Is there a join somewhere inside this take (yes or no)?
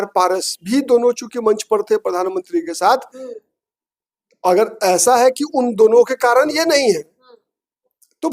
no